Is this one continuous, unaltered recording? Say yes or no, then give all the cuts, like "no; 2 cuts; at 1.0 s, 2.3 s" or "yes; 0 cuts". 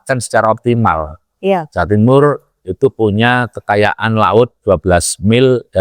yes; 0 cuts